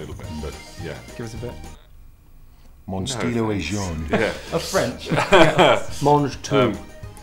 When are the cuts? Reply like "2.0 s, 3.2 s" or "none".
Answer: none